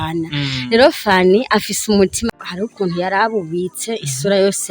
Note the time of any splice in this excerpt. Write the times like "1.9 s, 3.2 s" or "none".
2.3 s